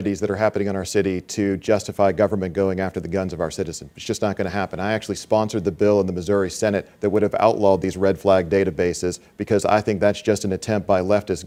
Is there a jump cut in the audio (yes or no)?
no